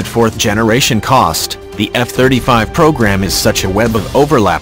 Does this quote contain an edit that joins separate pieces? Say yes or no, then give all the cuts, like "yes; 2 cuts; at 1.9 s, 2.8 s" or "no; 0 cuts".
no; 0 cuts